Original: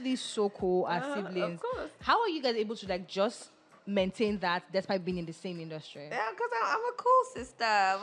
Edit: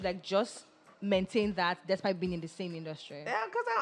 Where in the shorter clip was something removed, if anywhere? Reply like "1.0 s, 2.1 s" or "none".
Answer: none